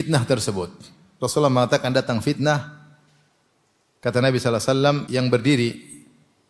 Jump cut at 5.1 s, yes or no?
yes